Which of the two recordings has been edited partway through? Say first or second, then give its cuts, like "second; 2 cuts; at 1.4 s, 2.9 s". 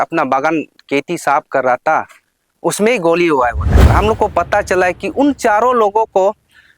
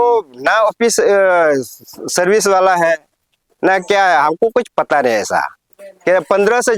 first; 1 cut; at 3.8 s